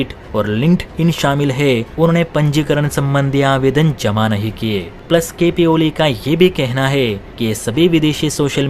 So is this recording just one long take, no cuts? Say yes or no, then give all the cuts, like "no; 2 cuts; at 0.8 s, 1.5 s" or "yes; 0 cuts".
yes; 0 cuts